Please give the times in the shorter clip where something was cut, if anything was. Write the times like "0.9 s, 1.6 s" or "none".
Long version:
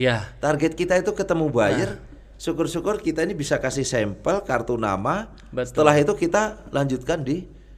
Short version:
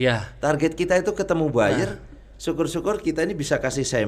none